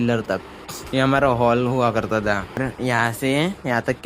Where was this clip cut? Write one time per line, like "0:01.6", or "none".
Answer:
0:02.6